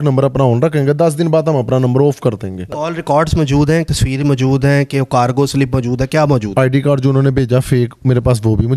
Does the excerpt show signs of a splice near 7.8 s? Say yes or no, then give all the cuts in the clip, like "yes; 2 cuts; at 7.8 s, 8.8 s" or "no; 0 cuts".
no; 3 cuts; at 2.8 s, 3.9 s, 6.5 s